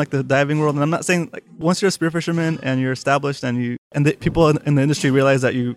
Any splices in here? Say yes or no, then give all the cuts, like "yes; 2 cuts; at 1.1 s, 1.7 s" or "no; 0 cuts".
yes; 1 cut; at 3.9 s